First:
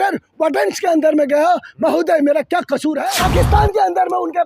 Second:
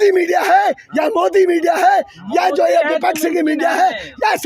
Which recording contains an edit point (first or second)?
first